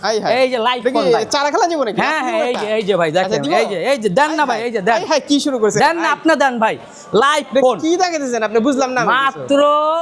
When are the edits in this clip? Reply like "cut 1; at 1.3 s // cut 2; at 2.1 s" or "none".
none